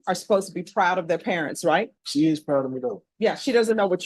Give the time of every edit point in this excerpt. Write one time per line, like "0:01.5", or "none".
0:02.0
0:03.0